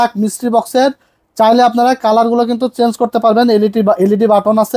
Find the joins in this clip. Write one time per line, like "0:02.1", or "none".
none